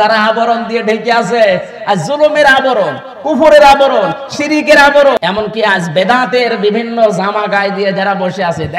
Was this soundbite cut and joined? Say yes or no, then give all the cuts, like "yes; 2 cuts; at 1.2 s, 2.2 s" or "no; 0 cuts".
yes; 1 cut; at 5.2 s